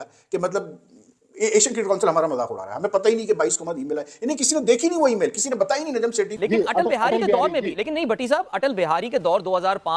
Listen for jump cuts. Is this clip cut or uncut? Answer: cut